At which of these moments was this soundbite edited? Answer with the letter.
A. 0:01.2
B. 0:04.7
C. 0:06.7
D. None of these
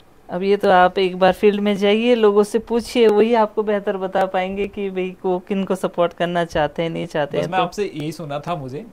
D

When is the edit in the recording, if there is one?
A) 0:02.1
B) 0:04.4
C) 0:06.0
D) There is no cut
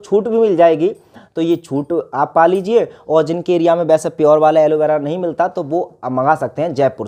D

